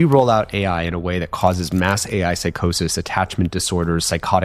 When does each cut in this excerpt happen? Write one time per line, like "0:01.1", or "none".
none